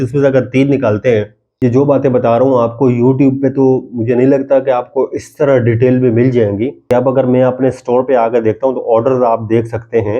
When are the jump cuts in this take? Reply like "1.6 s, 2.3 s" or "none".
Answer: 1.4 s, 6.9 s